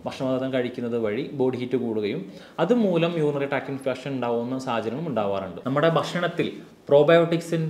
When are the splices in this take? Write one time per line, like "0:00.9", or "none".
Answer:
0:05.5